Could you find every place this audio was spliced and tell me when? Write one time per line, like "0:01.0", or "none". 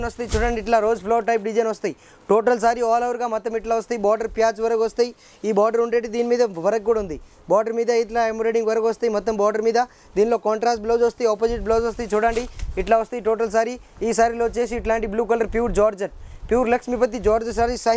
none